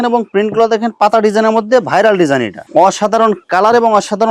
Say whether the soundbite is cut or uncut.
cut